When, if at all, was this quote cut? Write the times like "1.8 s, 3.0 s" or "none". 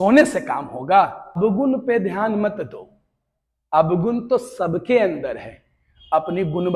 1.4 s